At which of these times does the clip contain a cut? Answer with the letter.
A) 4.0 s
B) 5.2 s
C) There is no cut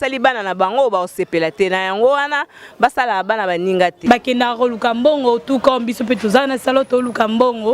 A